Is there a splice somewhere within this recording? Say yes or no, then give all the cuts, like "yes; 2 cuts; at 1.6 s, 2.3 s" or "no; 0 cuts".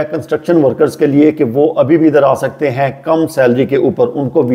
no; 0 cuts